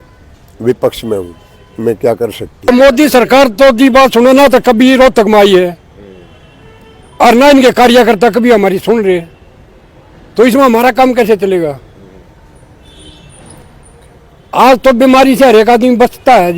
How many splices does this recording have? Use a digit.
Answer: 1